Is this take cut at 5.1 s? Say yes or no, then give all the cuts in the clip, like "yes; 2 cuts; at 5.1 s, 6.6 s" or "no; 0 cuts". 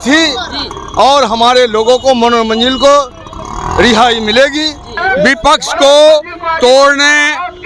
yes; 1 cut; at 5.1 s